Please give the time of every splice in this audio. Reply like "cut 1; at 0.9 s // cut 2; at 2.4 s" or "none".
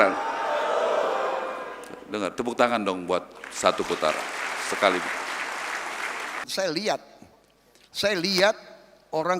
cut 1; at 6.5 s